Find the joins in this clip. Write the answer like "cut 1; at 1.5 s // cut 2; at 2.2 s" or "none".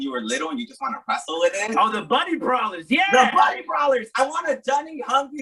none